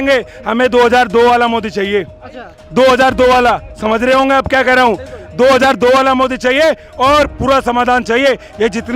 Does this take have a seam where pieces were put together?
no; 0 cuts

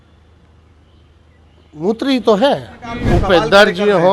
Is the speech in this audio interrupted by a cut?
yes; 1 cut; at 3.0 s

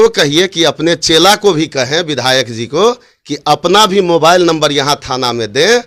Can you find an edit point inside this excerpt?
no; 0 cuts

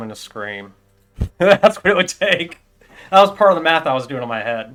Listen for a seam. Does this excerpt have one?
no; 0 cuts

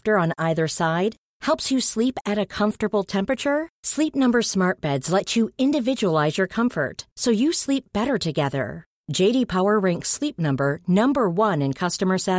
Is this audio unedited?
yes; 0 cuts

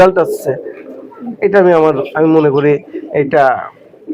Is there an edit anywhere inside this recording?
no; 0 cuts

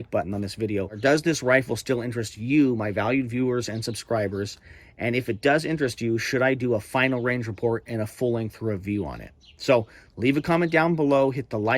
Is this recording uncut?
no; 1 cut; at 0.9 s

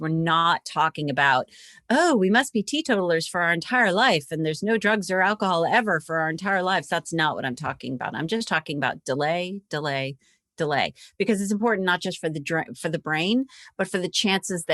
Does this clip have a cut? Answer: no; 0 cuts

